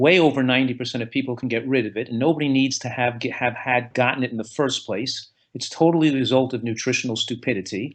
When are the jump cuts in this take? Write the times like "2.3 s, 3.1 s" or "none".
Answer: none

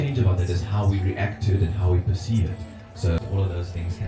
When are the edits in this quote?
3.2 s

